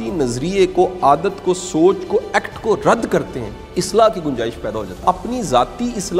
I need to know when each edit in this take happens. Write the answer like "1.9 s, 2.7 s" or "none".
5.0 s

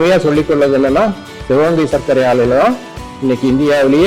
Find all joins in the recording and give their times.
none

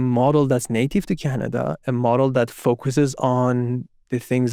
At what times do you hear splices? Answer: none

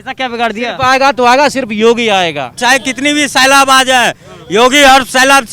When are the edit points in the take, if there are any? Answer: 2.6 s

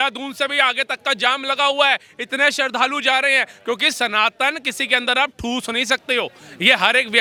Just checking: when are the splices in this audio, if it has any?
none

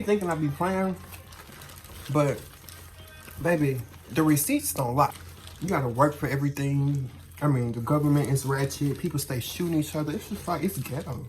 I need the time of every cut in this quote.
5.2 s

